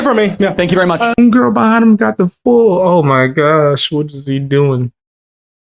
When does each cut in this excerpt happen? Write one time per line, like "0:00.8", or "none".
0:01.2